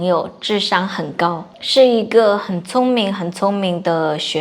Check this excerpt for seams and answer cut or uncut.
cut